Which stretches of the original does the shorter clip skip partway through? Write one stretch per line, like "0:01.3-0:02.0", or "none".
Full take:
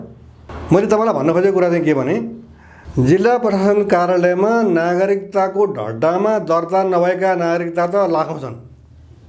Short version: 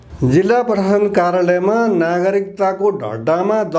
none